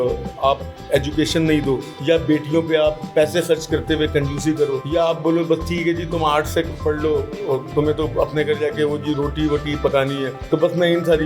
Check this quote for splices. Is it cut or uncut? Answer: cut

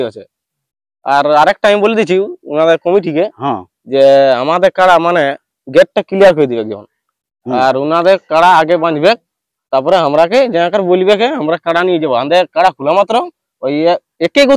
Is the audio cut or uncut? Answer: uncut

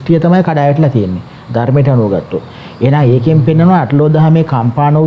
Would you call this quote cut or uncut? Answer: uncut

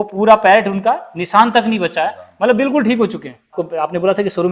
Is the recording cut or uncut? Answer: cut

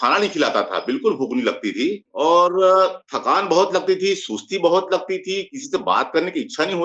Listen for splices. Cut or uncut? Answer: cut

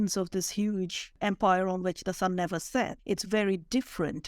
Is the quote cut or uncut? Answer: cut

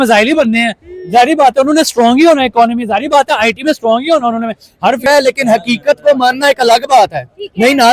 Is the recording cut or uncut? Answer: cut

